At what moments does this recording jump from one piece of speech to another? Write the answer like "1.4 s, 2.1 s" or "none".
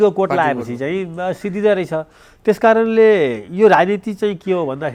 none